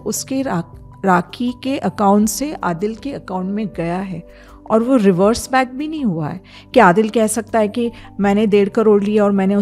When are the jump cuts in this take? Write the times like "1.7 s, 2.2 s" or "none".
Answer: none